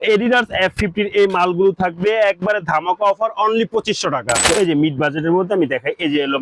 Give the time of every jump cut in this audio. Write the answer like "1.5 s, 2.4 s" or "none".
4.4 s